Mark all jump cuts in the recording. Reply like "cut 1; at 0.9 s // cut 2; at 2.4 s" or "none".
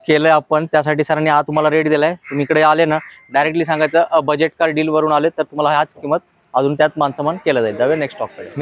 none